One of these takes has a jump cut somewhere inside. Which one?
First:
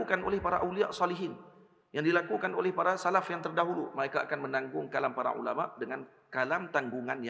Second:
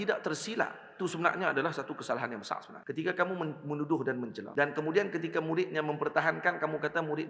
second; 2 cuts; at 2.7 s, 4.4 s

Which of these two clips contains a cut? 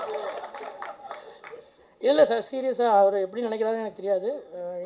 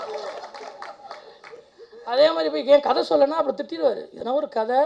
second; 1 cut; at 1.7 s

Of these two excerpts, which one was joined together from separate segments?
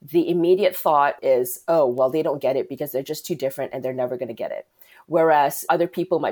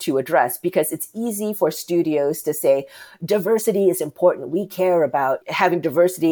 second; 1 cut; at 5.4 s

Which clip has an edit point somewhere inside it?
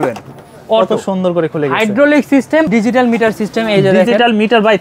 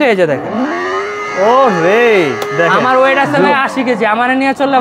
first; 1 cut; at 2.7 s

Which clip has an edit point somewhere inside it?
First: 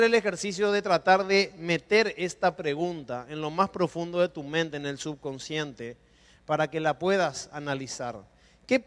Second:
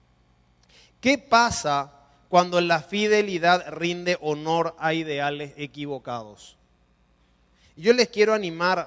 second; 1 cut; at 1.1 s

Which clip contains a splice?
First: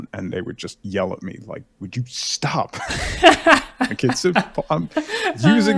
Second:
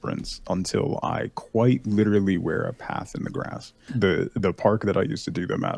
second; 1 cut; at 3.9 s

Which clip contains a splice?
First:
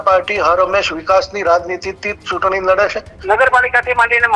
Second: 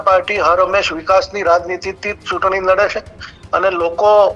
first; 1 cut; at 3.1 s

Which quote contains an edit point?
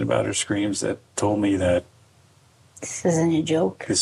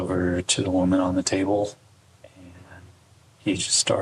second; 1 cut; at 2.0 s

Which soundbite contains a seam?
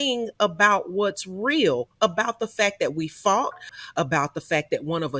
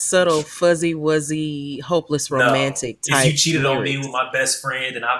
first; 1 cut; at 3.8 s

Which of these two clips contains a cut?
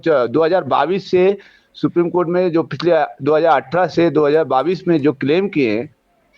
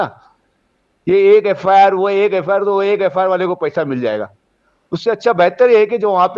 second; 1 cut; at 2.0 s

